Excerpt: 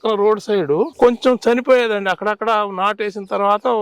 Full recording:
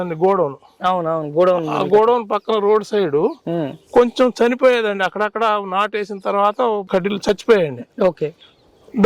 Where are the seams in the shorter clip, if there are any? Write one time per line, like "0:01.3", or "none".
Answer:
0:00.9